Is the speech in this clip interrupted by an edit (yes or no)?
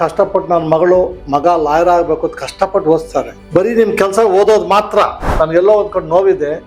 yes